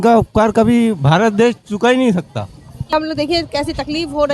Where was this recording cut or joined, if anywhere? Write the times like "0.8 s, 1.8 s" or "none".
2.9 s

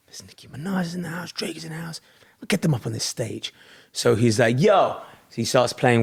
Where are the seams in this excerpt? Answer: none

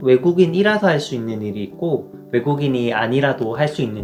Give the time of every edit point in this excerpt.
none

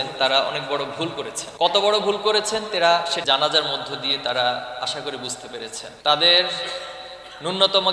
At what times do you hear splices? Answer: 1.5 s, 6.0 s

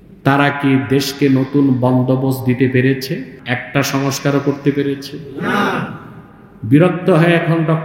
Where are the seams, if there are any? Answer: 3.3 s

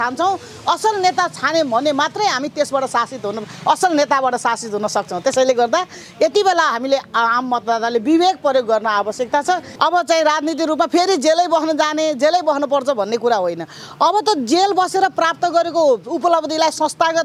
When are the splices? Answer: 9.7 s

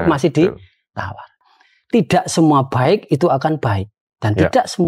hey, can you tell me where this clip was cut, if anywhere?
1.4 s

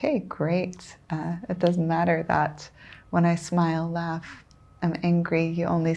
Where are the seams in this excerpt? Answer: none

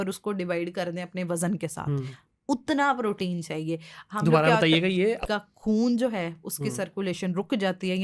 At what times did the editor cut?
5.2 s

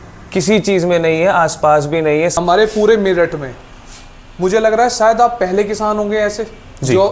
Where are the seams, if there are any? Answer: 2.3 s

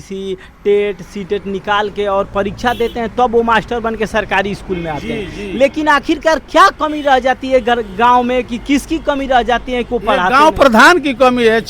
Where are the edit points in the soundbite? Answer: none

